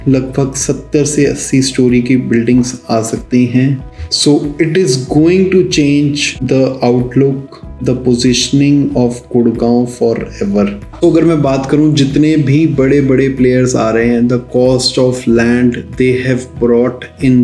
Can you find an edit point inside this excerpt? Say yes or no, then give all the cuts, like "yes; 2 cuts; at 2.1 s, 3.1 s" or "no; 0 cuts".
yes; 2 cuts; at 3.8 s, 10.8 s